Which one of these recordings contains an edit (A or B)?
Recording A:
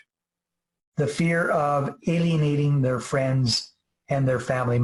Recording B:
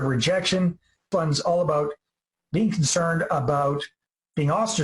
B